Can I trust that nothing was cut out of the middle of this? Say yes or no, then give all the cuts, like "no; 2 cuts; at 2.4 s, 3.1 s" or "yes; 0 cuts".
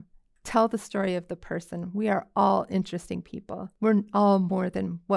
no; 1 cut; at 3.7 s